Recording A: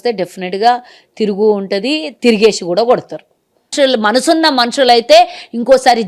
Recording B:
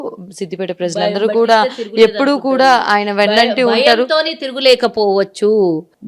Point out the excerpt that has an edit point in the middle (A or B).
A